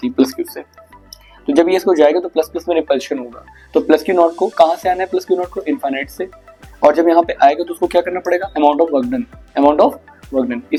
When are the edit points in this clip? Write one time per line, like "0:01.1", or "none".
none

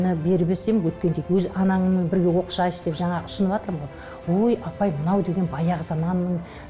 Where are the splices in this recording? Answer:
0:01.2

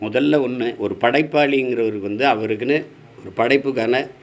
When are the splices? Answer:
none

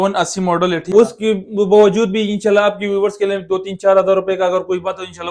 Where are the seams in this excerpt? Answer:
0:00.9

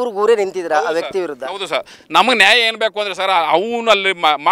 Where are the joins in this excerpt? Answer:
none

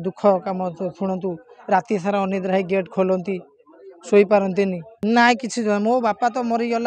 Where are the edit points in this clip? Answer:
0:04.9

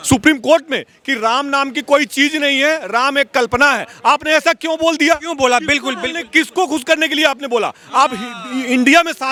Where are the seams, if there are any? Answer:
none

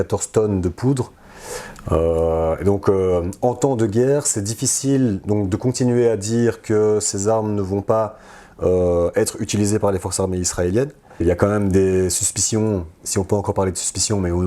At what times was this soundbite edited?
0:11.2

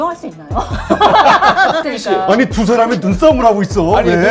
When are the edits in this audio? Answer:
0:01.8

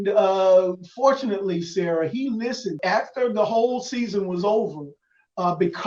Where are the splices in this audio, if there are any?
0:02.8

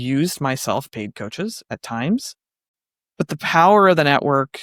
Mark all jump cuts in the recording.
none

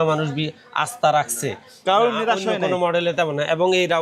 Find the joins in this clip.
none

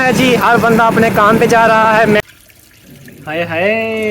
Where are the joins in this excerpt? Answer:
0:02.2

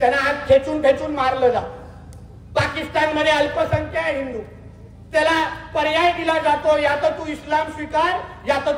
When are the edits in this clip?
none

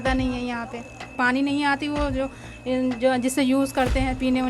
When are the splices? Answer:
0:01.1

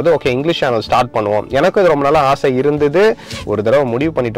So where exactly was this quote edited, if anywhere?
0:03.3

